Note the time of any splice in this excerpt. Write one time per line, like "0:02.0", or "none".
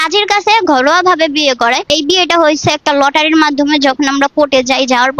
0:01.9